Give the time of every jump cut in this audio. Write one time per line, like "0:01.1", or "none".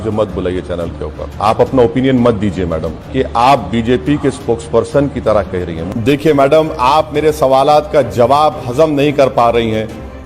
0:01.3
0:02.9
0:05.8